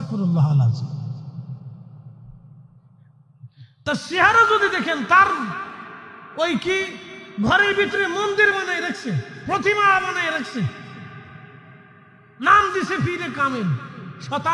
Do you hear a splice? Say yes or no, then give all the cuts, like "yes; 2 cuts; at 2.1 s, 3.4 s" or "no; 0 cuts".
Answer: no; 0 cuts